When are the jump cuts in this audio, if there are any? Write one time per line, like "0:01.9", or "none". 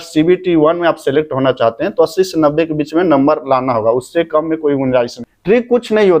0:05.3